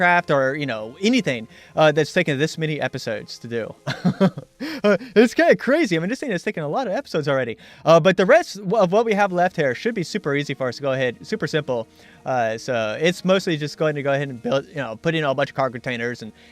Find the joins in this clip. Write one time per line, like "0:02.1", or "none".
0:05.3